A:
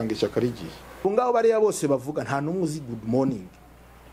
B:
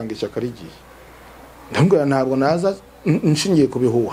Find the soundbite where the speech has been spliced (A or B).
A